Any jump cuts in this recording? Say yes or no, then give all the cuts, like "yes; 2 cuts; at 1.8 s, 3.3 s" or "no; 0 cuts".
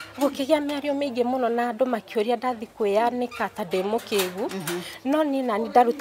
no; 0 cuts